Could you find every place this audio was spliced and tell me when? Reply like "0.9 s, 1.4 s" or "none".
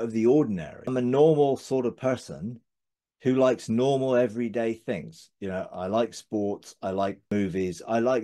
0.9 s, 7.3 s